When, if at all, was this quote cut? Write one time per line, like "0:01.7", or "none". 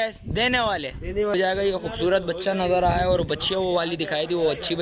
0:01.3